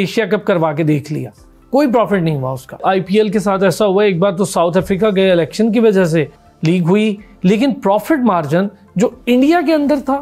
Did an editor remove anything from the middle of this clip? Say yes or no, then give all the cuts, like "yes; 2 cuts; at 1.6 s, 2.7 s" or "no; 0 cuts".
yes; 2 cuts; at 2.8 s, 6.4 s